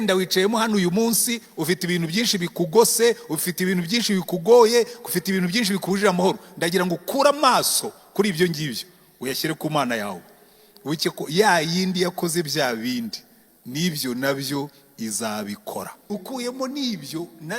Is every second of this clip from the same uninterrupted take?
no; 1 cut; at 16.1 s

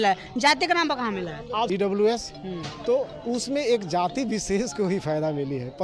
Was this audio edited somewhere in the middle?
yes; 1 cut; at 1.7 s

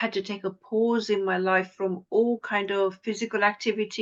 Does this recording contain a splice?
no; 0 cuts

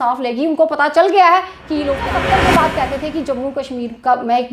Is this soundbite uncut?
no; 1 cut; at 2.1 s

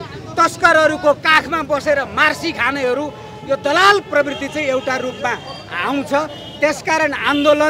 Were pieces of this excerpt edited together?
no; 0 cuts

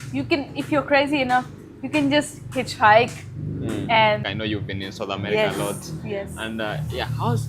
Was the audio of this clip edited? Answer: yes; 1 cut; at 4.3 s

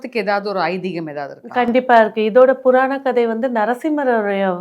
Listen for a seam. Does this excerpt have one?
no; 0 cuts

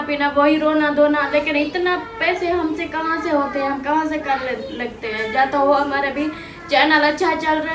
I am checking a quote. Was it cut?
no; 0 cuts

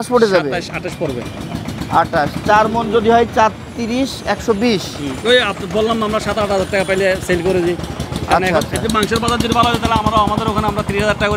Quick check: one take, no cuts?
yes; 0 cuts

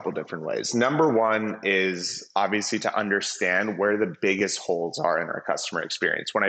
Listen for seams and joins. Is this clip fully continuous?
yes; 0 cuts

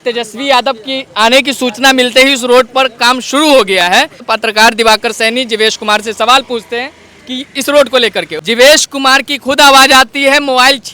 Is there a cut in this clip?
yes; 2 cuts; at 4.3 s, 8.3 s

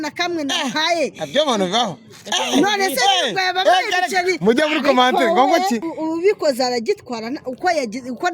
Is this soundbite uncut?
no; 1 cut; at 5.9 s

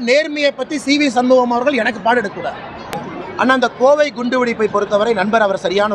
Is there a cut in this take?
yes; 1 cut; at 2.9 s

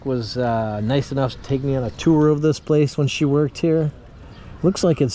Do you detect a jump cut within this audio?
yes; 1 cut; at 4.1 s

